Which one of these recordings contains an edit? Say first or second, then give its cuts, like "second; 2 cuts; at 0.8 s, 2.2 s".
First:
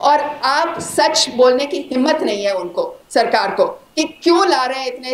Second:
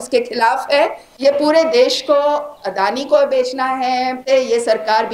second; 2 cuts; at 1.1 s, 4.2 s